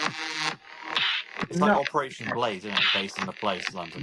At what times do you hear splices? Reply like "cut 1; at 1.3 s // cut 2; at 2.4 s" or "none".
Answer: none